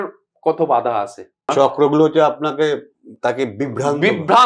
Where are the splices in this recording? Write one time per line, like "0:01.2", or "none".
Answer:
0:01.5